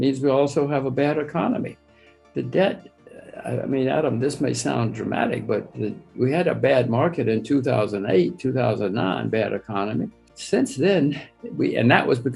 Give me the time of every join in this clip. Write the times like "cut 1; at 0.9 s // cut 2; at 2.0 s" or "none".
none